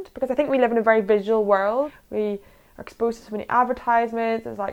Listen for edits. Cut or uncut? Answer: cut